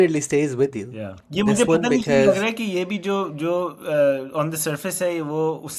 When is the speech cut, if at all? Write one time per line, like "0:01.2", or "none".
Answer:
0:01.1